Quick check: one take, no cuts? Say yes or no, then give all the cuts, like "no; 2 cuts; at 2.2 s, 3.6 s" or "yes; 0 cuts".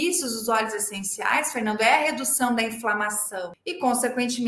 no; 1 cut; at 3.5 s